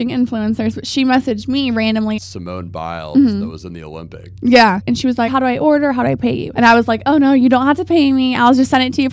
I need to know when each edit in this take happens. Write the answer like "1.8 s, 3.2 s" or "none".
2.2 s, 5.3 s, 6.4 s